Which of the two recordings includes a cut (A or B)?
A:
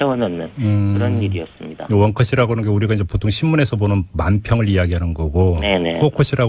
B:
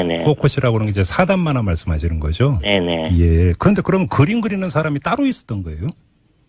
A